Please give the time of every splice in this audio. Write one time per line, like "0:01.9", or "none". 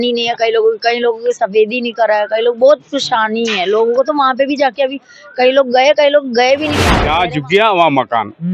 0:06.9